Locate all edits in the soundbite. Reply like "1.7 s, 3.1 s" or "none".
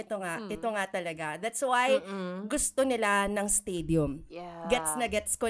none